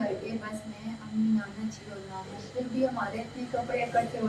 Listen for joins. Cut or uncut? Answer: uncut